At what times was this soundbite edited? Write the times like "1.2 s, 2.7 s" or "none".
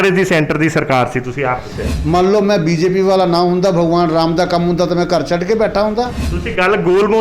1.9 s